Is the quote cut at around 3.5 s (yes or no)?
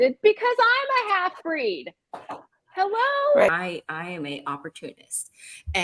yes